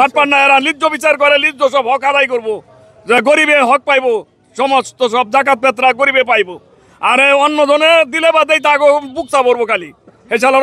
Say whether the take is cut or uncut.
uncut